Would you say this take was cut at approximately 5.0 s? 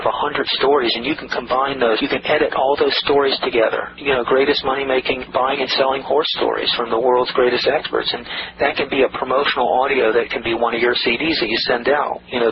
no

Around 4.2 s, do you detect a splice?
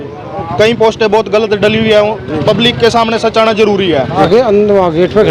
yes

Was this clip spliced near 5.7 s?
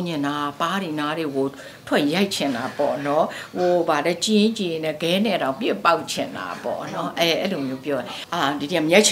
no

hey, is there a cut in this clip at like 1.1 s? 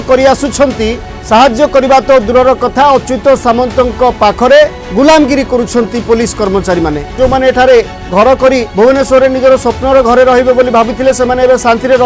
yes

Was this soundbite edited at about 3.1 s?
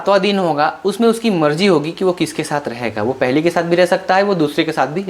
no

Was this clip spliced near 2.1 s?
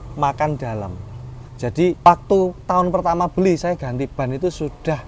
yes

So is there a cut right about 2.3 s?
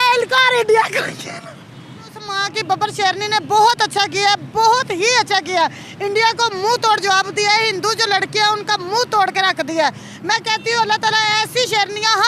yes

